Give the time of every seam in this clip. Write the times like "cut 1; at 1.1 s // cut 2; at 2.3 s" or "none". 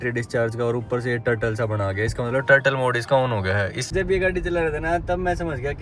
cut 1; at 3.9 s